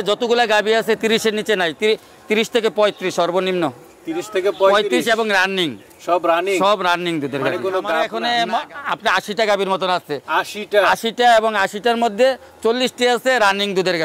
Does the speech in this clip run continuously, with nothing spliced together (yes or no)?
no